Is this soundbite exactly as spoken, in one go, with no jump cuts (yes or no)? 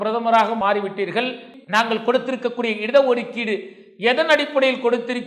no